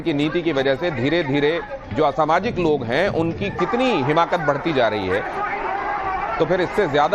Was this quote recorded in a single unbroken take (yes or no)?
no